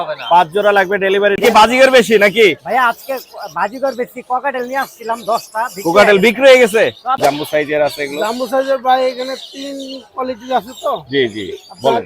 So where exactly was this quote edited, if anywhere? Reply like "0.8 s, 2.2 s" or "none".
1.4 s, 7.2 s